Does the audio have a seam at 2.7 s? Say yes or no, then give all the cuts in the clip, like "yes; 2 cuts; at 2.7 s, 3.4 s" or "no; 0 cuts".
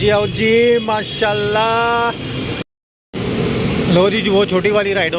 yes; 1 cut; at 2.7 s